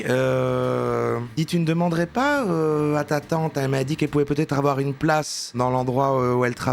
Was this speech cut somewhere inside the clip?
no; 0 cuts

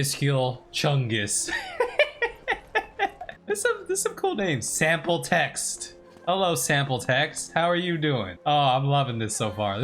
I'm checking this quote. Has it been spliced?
no; 0 cuts

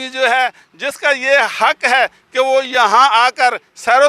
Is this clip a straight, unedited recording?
yes; 0 cuts

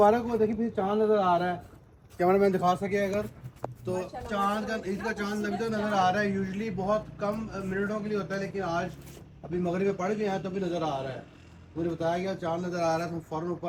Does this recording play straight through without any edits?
yes; 0 cuts

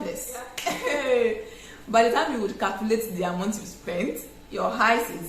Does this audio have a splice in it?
yes; 1 cut; at 1.0 s

